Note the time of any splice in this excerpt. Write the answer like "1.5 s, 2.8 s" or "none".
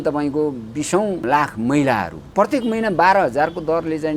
1.2 s, 2.2 s